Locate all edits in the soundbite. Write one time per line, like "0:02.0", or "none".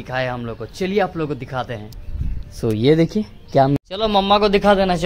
0:03.8